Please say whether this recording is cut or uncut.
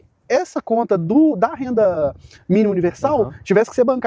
uncut